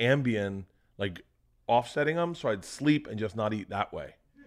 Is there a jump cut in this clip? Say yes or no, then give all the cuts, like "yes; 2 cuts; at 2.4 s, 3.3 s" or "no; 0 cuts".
no; 0 cuts